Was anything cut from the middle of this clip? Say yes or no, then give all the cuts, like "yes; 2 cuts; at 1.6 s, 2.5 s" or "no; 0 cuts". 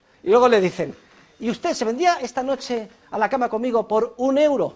no; 0 cuts